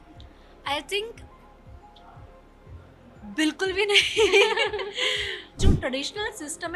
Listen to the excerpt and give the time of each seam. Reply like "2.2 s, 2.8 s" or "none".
5.6 s